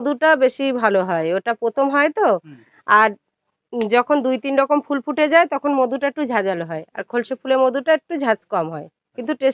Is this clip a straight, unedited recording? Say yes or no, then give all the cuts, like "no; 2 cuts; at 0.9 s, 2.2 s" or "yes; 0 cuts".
yes; 0 cuts